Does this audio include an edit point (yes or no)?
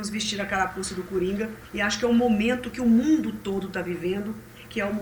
yes